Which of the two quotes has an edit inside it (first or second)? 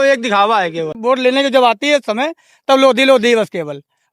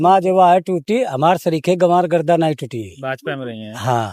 first